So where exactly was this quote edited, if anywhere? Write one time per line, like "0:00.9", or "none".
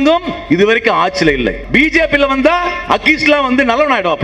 0:01.6